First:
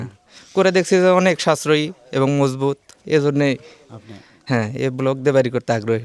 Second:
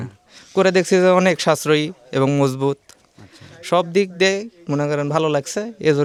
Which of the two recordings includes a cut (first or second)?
first